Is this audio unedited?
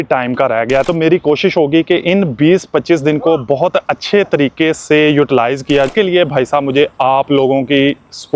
no; 2 cuts; at 0.8 s, 5.9 s

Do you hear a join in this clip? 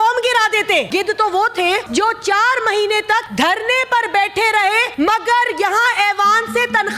yes; 4 cuts; at 0.9 s, 1.9 s, 3.3 s, 4.9 s

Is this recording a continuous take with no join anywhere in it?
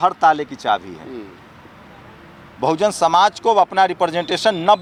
yes; 0 cuts

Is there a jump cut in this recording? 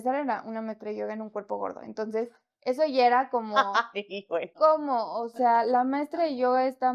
no; 0 cuts

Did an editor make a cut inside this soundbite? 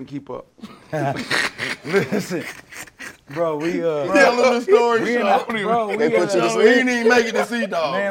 yes; 1 cut; at 4.1 s

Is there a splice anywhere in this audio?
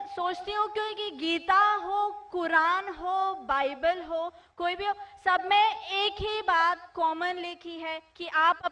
no; 0 cuts

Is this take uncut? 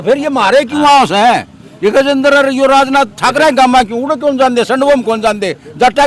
yes; 0 cuts

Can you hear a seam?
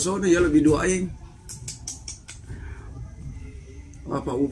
no; 0 cuts

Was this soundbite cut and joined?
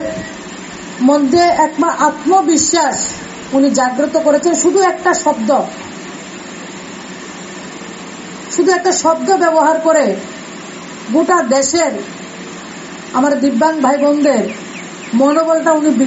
no; 0 cuts

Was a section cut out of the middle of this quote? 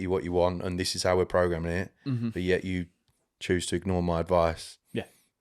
no; 0 cuts

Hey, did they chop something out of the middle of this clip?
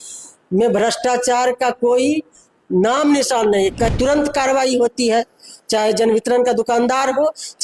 yes; 1 cut; at 3.9 s

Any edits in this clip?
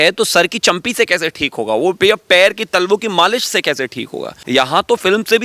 yes; 1 cut; at 4.4 s

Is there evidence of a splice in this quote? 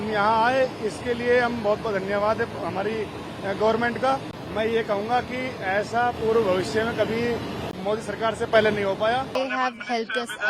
yes; 2 cuts; at 4.4 s, 9.3 s

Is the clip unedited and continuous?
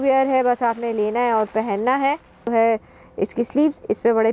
no; 1 cut; at 2.5 s

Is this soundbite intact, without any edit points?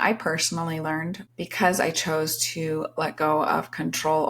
no; 1 cut; at 1.2 s

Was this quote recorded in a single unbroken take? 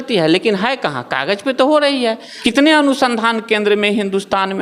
no; 1 cut; at 2.3 s

